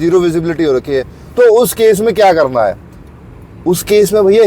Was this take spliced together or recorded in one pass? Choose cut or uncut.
uncut